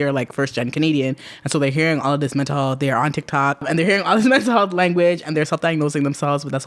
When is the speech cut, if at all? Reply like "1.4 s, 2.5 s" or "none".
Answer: 3.6 s